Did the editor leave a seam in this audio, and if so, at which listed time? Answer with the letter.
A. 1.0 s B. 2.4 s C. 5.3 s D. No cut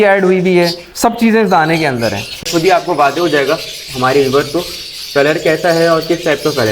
B